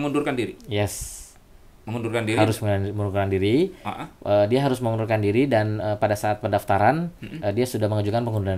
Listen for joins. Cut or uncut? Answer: uncut